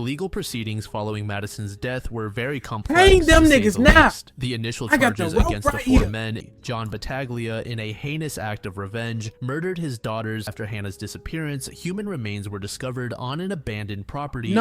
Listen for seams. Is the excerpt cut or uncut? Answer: cut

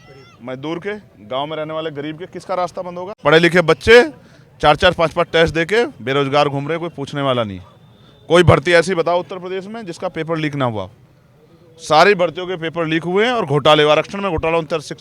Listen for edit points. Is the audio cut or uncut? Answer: cut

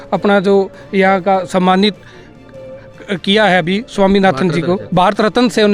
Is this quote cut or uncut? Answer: uncut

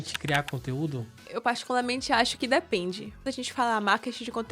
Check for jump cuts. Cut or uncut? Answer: cut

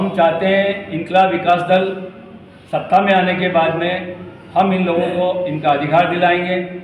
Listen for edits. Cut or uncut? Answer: uncut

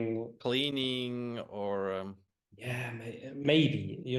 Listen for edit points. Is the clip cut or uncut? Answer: uncut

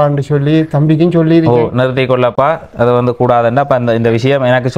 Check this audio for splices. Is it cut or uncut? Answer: uncut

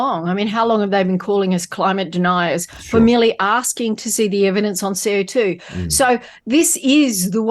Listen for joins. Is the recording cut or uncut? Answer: uncut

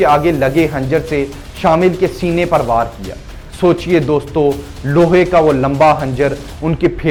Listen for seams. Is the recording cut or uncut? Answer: uncut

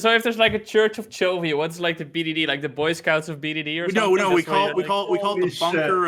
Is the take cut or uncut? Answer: uncut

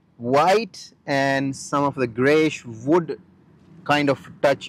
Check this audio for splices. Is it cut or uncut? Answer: uncut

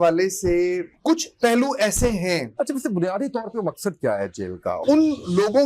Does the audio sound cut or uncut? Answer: cut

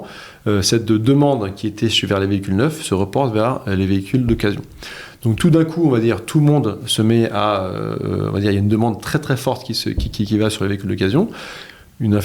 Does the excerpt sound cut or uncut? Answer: uncut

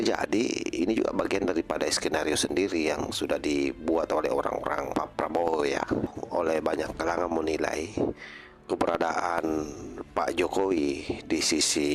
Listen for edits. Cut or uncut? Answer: cut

